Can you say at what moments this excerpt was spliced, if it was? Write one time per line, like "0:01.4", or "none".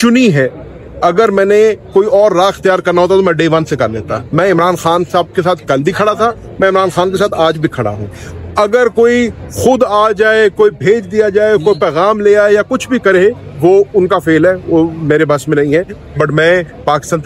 none